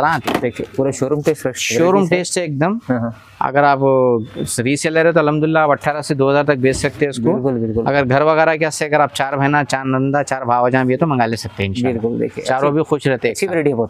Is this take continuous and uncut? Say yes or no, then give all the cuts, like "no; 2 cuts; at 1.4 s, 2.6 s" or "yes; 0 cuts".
yes; 0 cuts